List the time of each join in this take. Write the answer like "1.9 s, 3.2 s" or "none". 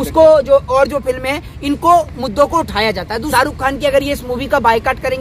3.2 s